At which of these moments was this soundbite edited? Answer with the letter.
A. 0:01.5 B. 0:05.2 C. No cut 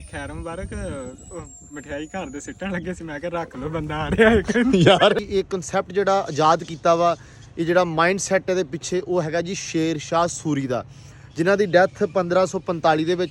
B